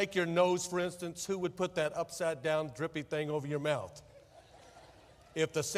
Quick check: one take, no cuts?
yes; 0 cuts

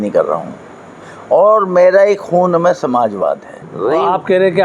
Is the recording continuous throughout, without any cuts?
no; 1 cut; at 3.7 s

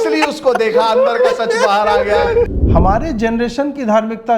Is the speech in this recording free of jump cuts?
no; 1 cut; at 2.5 s

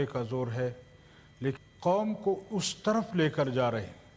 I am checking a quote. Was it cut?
yes; 1 cut; at 1.6 s

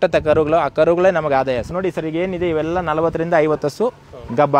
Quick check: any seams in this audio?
yes; 1 cut; at 1.7 s

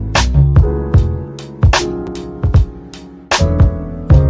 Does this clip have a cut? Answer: yes; 1 cut; at 2.1 s

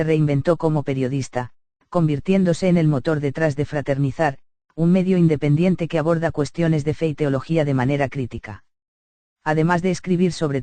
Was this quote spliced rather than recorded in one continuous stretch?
no; 0 cuts

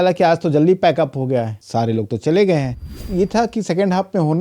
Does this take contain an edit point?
yes; 1 cut; at 3.0 s

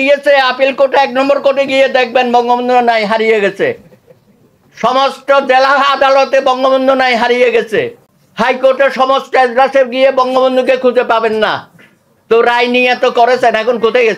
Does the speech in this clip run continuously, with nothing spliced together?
yes; 0 cuts

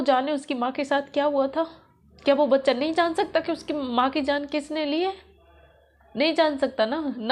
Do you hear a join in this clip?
no; 0 cuts

